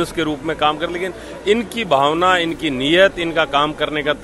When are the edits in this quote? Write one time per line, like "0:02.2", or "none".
none